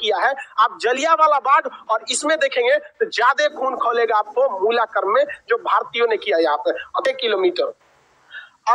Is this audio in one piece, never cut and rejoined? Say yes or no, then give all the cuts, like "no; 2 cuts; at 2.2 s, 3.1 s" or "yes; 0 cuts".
no; 1 cut; at 7.0 s